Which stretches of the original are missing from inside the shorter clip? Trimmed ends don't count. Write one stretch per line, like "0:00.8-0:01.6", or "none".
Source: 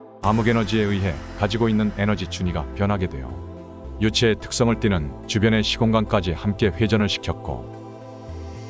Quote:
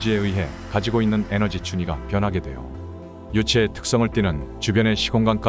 none